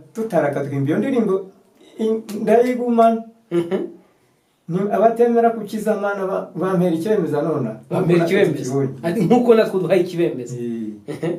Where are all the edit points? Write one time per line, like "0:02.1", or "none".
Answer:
none